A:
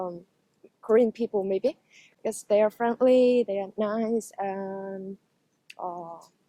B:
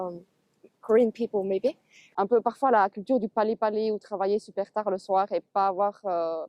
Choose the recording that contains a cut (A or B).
B